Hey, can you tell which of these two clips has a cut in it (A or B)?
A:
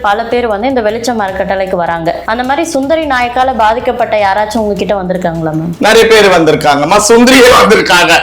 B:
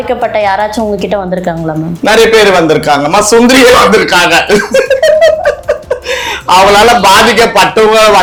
A